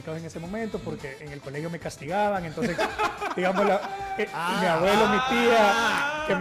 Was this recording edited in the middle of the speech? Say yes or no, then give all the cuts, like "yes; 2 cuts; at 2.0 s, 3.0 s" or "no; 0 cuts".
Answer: no; 0 cuts